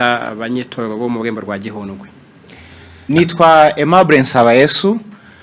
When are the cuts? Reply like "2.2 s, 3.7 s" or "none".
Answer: 3.1 s